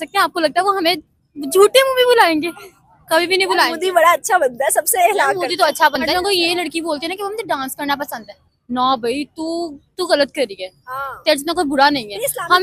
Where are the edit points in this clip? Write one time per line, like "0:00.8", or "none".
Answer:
none